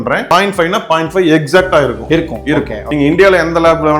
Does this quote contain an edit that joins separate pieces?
yes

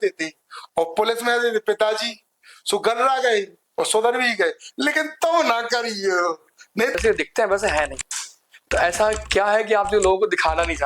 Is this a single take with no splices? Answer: no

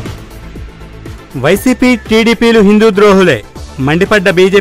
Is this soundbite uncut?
no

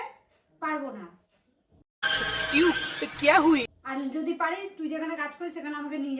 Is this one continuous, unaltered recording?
yes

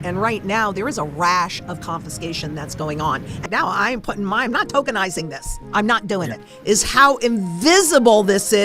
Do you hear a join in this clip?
yes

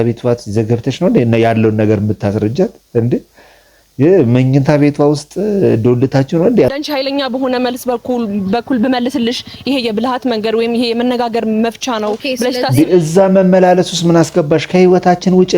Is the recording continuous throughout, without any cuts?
no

